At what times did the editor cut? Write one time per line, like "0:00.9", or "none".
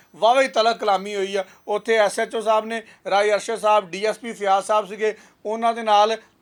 none